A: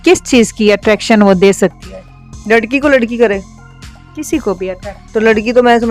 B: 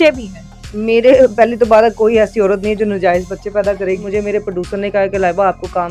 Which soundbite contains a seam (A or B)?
B